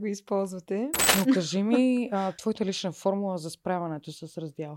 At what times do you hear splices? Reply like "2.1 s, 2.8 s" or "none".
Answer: 1.0 s, 2.4 s